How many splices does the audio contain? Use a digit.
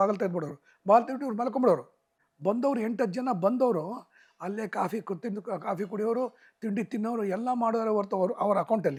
0